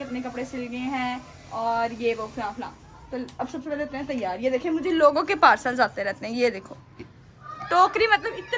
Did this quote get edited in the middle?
no; 0 cuts

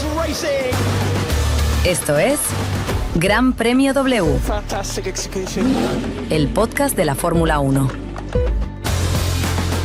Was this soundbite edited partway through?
no; 0 cuts

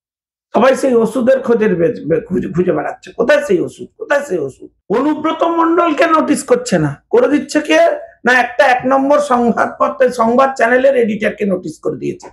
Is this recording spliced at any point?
yes; 1 cut; at 4.7 s

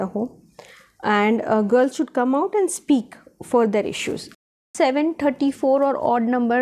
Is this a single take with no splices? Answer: no; 1 cut; at 4.7 s

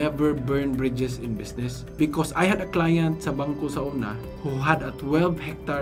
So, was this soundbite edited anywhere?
no; 0 cuts

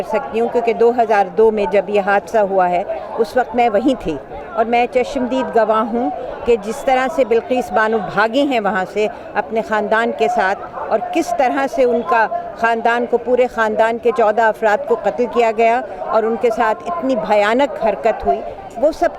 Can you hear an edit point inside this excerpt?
no; 0 cuts

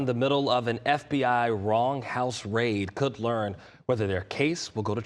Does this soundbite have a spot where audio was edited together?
no; 0 cuts

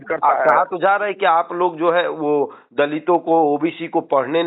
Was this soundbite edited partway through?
no; 0 cuts

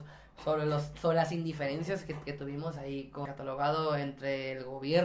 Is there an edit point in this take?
yes; 1 cut; at 3.2 s

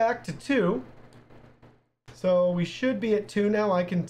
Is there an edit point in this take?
no; 0 cuts

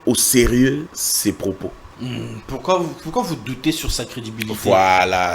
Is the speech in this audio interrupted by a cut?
yes; 2 cuts; at 1.0 s, 1.9 s

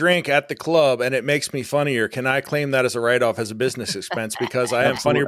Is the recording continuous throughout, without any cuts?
yes; 0 cuts

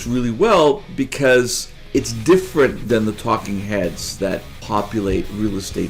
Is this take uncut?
no; 3 cuts; at 1.8 s, 2.8 s, 4.6 s

